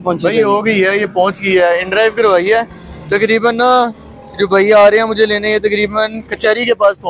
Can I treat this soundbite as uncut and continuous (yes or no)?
yes